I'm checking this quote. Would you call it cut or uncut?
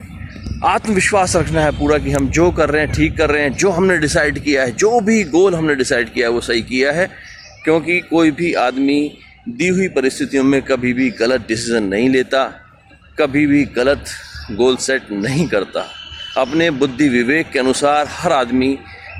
uncut